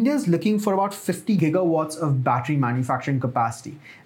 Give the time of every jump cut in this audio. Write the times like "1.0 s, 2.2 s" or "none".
1.4 s